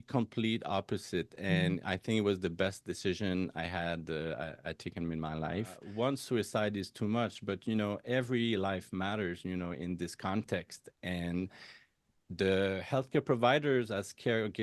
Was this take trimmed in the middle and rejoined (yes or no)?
yes